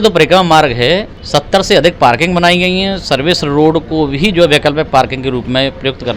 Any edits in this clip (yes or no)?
yes